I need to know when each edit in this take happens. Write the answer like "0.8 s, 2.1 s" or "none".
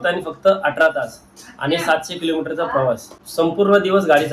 3.2 s